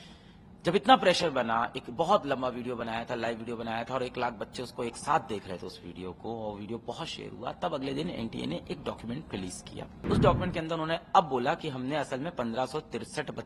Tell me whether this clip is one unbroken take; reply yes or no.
no